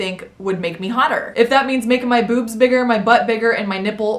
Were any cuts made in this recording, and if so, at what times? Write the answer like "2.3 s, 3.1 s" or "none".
1.3 s